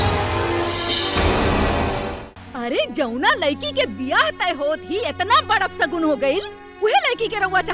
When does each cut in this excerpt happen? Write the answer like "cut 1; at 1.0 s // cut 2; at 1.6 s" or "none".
cut 1; at 2.1 s